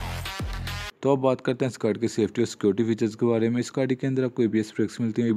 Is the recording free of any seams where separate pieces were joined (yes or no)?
no